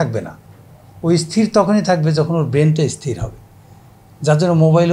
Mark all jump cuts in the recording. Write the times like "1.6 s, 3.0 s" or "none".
none

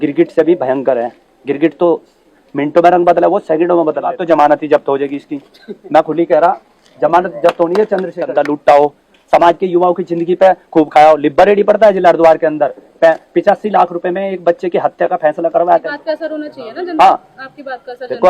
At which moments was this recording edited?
4.2 s, 8.2 s, 15.9 s

